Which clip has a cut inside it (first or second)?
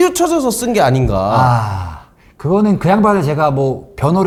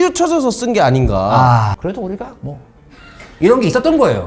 second